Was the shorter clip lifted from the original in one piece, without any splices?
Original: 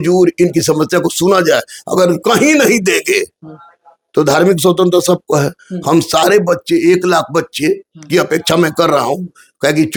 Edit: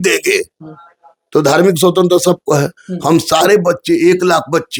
yes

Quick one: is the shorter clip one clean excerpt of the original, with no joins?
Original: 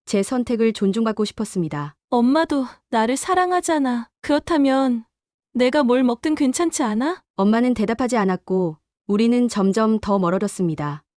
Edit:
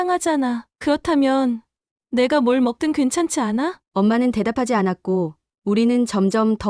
yes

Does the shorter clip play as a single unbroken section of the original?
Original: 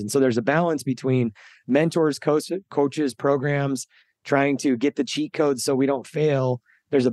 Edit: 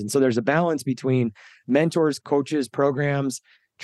no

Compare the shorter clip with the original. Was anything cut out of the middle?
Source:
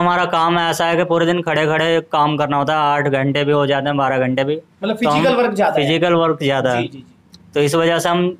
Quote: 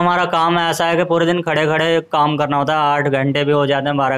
no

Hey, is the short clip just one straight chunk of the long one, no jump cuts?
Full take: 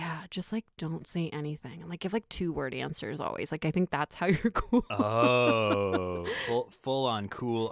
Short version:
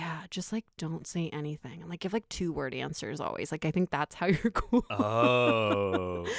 yes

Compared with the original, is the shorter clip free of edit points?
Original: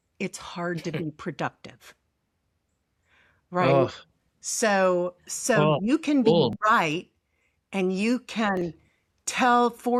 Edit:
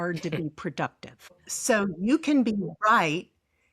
no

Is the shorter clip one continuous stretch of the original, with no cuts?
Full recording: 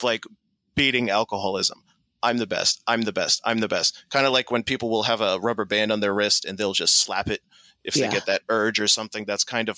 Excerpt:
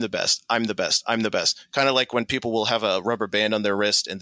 yes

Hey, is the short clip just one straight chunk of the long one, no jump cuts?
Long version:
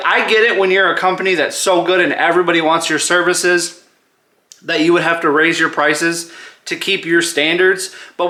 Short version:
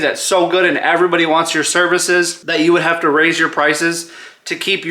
no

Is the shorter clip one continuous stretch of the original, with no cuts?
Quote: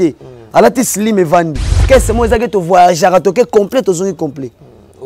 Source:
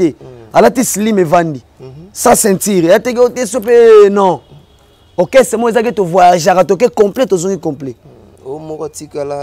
no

